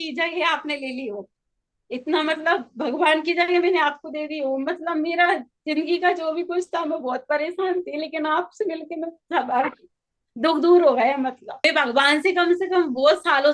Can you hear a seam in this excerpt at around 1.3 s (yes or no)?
no